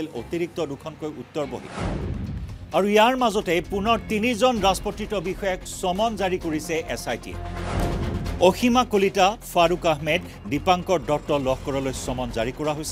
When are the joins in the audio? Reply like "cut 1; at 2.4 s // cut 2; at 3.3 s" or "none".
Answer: cut 1; at 1.6 s